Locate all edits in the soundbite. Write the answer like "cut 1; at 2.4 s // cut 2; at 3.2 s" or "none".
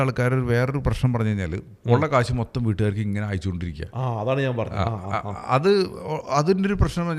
cut 1; at 1.7 s